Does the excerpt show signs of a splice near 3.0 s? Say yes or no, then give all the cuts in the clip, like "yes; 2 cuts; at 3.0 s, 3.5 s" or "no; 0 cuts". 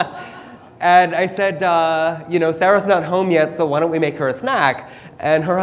no; 1 cut; at 1.3 s